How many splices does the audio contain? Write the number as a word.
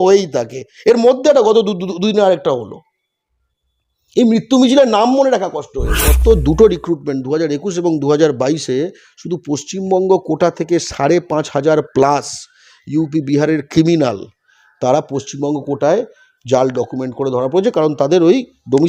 one